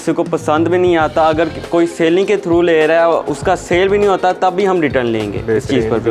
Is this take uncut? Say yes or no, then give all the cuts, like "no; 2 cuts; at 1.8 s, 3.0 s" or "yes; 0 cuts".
yes; 0 cuts